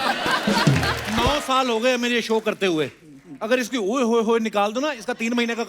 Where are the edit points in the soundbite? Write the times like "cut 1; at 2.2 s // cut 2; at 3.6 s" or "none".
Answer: cut 1; at 1.0 s

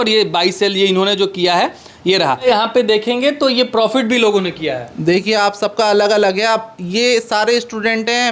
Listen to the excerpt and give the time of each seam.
cut 1; at 2.4 s

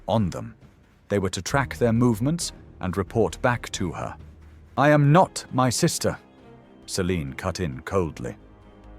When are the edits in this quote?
cut 1; at 4.7 s

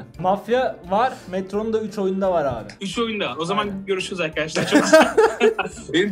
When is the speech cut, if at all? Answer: none

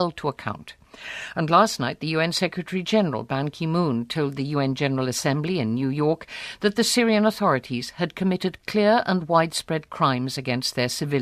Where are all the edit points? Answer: cut 1; at 6.5 s

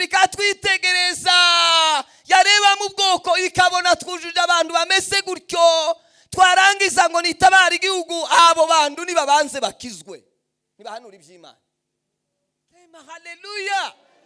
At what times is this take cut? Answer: cut 1; at 13.0 s

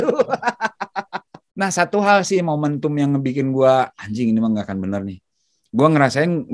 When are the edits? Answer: cut 1; at 1.4 s

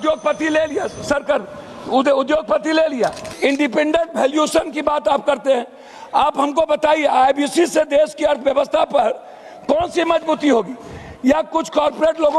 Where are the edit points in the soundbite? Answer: cut 1; at 3.2 s

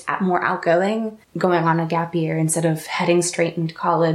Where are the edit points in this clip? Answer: cut 1; at 1.2 s

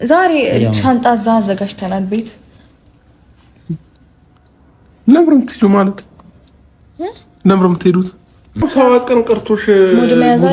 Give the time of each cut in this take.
cut 1; at 8.6 s

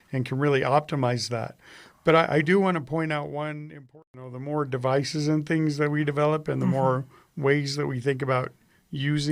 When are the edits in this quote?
cut 1; at 3.9 s

